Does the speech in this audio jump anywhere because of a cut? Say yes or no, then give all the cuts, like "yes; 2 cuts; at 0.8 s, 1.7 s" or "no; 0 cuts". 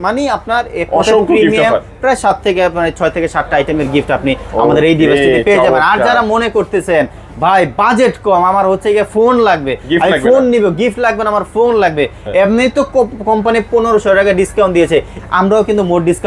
yes; 1 cut; at 15.2 s